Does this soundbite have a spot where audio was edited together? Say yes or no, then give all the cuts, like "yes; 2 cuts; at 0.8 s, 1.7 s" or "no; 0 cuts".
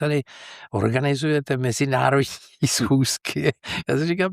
no; 0 cuts